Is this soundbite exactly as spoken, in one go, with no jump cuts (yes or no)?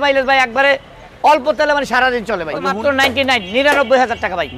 no